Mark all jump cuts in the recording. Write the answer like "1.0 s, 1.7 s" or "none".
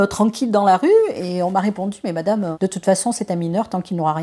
2.5 s

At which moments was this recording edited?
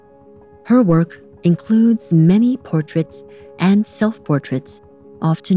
none

